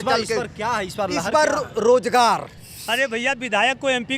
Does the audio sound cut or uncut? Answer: cut